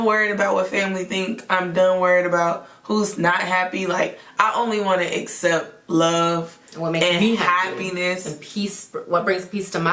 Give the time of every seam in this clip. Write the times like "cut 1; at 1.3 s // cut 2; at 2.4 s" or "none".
none